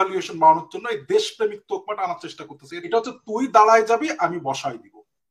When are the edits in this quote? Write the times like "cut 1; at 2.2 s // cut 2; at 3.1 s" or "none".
cut 1; at 2.9 s